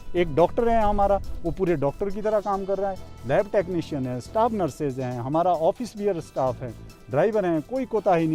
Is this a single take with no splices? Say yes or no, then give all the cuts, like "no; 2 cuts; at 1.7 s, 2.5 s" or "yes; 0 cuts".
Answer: yes; 0 cuts